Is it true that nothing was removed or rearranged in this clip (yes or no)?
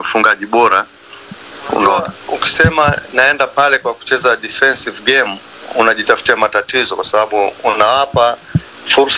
no